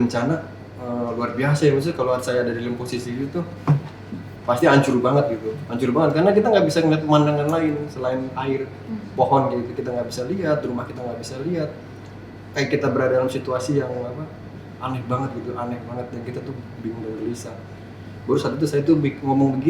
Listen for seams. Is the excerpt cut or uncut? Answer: uncut